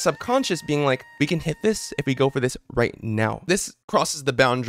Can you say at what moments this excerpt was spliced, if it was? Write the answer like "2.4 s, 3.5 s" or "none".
1.1 s, 3.8 s